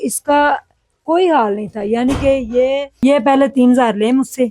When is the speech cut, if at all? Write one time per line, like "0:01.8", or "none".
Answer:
0:02.9